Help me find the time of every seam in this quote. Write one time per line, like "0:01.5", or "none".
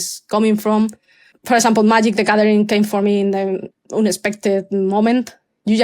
0:01.3
0:03.8